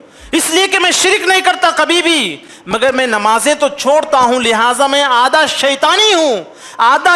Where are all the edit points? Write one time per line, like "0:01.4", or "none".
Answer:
none

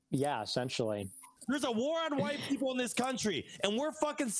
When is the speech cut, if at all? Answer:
0:01.3

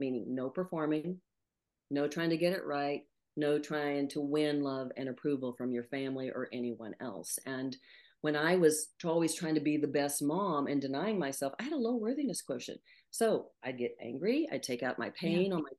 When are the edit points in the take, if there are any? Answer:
none

